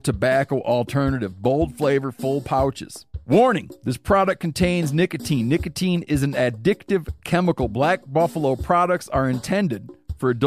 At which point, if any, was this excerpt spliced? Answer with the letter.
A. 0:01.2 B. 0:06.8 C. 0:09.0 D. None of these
D